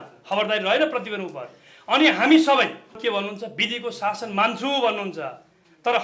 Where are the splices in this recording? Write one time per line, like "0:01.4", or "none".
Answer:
0:03.0

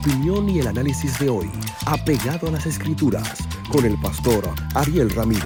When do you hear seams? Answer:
none

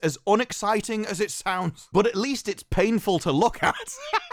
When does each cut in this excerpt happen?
none

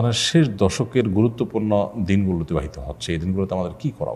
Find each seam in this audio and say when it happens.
none

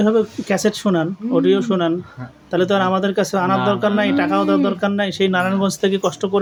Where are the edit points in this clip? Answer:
none

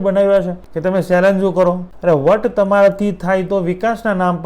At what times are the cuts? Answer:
0:01.9

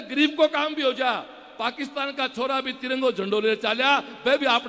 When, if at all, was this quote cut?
none

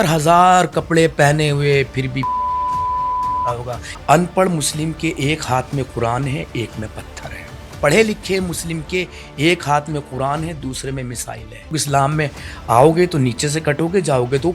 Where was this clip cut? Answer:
0:03.7
0:07.7
0:11.7

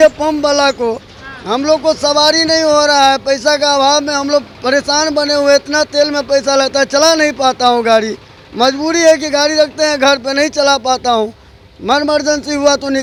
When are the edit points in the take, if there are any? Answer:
none

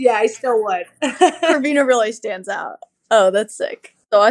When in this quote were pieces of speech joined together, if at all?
0:01.5

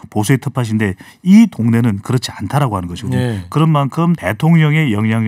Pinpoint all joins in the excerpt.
0:04.3

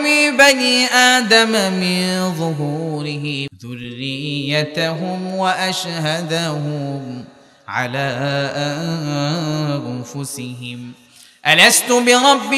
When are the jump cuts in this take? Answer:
0:03.5

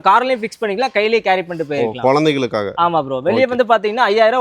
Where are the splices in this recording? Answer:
none

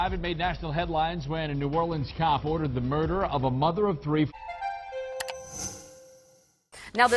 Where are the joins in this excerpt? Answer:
0:04.4

